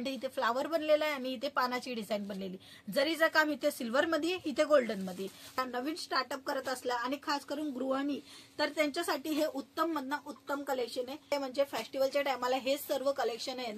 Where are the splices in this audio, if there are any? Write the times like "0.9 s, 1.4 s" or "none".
5.6 s, 11.3 s

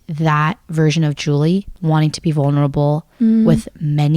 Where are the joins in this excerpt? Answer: 1.7 s

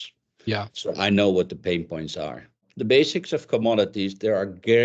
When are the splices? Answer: 2.7 s

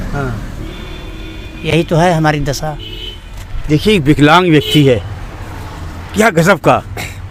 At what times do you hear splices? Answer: none

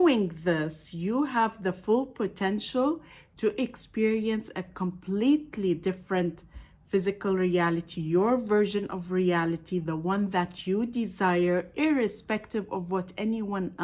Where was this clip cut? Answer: none

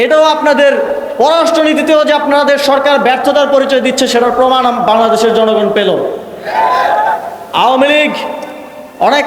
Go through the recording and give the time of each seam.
7.4 s

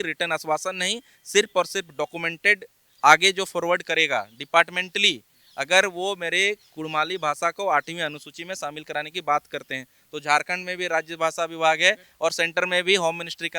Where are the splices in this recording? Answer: none

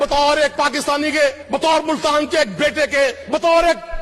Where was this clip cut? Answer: 1.4 s, 3.2 s

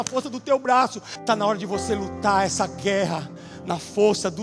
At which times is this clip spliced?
1.1 s

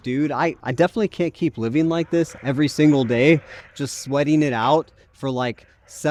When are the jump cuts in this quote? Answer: none

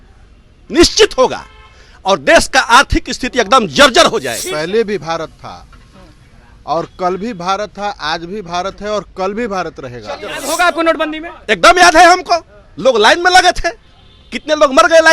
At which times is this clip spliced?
4.4 s, 10.3 s

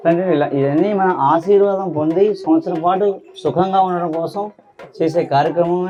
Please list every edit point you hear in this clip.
none

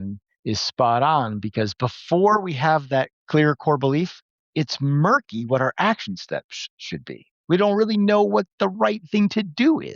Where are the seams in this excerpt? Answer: 3.2 s

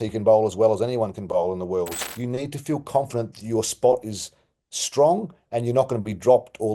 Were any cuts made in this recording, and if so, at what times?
2.0 s

